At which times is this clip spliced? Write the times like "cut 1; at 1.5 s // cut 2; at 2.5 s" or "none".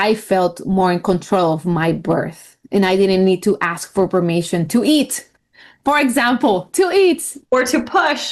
cut 1; at 7.4 s